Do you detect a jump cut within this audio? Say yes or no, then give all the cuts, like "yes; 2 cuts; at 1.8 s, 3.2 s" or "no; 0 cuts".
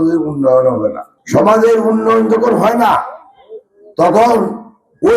yes; 1 cut; at 1.1 s